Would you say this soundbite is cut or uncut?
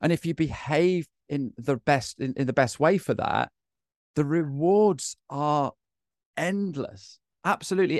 uncut